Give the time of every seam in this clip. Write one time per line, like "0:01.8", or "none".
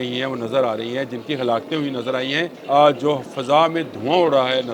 0:02.6

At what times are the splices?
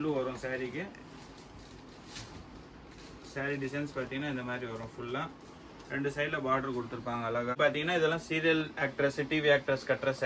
0:07.6

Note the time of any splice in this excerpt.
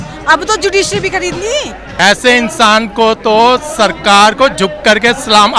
0:01.8

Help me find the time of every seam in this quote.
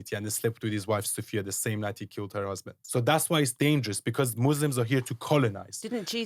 0:02.7

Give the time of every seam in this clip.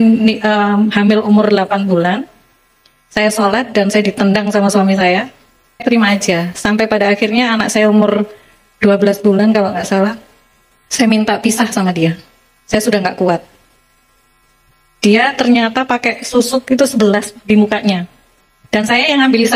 0:05.7

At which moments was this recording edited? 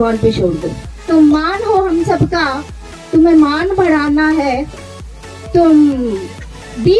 0:01.0

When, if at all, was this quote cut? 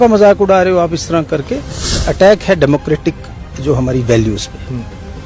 0:02.0

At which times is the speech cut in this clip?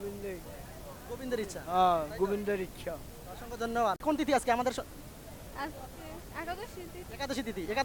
0:04.0

